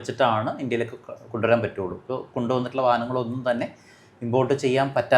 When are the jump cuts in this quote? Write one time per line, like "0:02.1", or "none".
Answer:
none